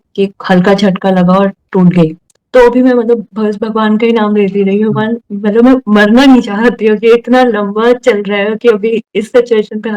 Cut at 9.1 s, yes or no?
no